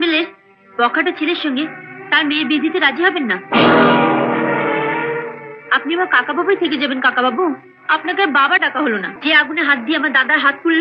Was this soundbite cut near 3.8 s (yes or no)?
no